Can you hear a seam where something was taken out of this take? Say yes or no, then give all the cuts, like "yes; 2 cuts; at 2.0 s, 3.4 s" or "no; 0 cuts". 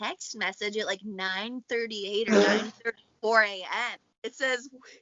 yes; 1 cut; at 4.0 s